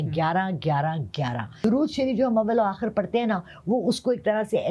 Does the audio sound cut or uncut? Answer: cut